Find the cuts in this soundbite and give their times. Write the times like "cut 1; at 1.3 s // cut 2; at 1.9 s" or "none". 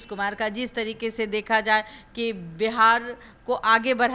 none